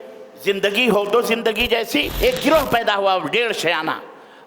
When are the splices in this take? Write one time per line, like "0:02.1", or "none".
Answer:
0:02.1